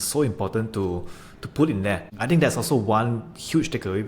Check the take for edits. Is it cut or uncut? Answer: cut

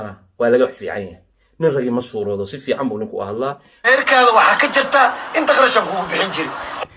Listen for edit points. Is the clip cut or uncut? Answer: cut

